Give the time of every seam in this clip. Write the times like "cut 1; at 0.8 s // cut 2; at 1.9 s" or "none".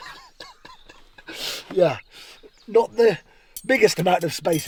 none